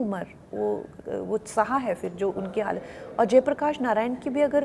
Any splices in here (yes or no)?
no